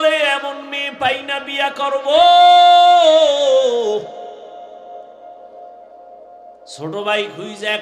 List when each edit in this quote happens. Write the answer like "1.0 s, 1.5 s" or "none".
none